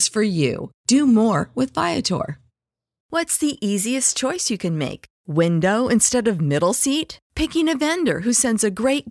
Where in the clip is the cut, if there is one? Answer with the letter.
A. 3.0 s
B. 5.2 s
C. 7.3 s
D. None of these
A